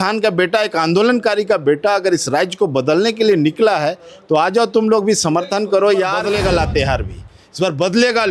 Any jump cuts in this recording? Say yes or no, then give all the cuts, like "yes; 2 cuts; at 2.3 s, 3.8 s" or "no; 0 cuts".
yes; 1 cut; at 6.2 s